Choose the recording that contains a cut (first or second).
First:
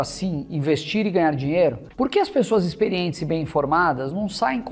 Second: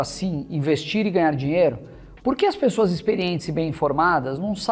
first